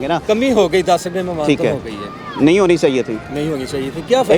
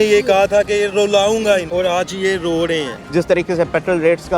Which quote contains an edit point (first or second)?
second